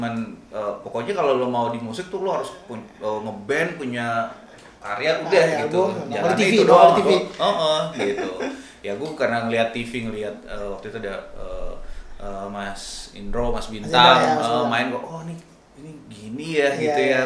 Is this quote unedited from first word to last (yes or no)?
yes